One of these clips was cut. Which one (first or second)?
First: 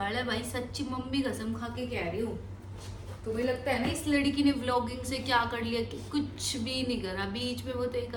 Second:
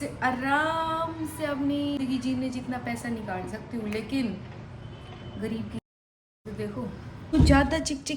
second